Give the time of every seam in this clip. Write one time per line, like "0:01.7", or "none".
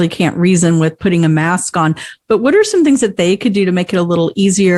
none

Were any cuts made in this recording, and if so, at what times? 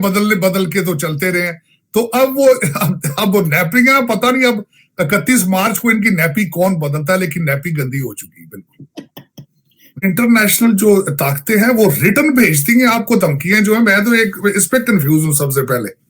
0:10.0

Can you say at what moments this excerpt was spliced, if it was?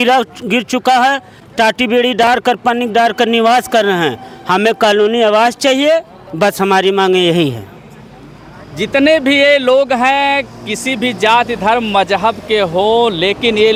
none

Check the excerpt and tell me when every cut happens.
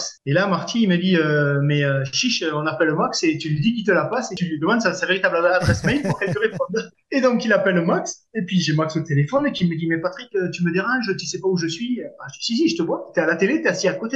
none

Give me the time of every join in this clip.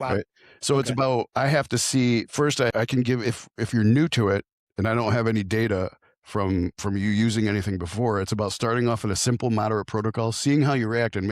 0:02.7

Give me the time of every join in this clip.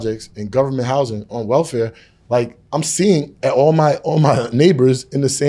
0:02.6

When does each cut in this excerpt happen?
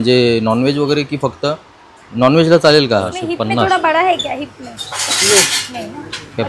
0:03.2

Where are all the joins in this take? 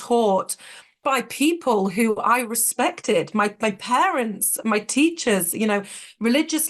0:01.0

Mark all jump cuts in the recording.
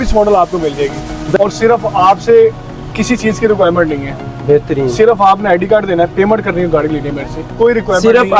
0:01.4

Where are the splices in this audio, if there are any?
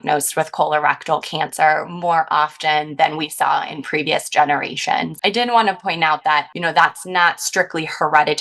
0:05.1
0:06.5

